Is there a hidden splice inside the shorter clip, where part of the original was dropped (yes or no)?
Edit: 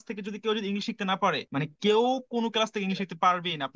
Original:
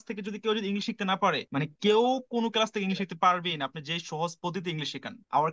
no